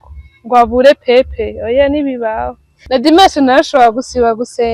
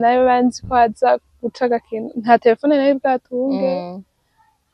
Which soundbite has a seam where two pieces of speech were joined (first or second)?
first